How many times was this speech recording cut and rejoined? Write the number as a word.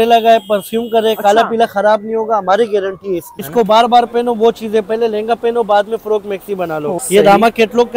two